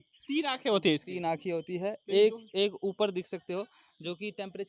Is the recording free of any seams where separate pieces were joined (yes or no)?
yes